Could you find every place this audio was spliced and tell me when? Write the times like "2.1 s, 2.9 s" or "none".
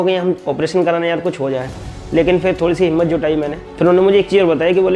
3.6 s